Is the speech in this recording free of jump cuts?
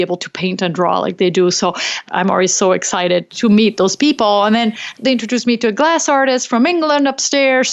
no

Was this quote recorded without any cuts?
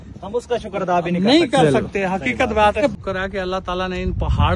no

